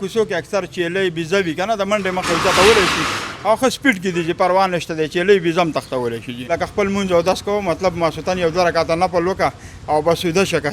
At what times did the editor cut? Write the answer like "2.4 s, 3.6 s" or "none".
6.3 s